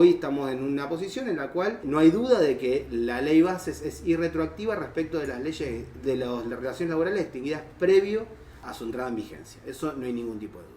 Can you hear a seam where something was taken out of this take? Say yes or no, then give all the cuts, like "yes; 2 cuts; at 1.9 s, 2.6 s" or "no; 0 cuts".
yes; 2 cuts; at 1.8 s, 8.6 s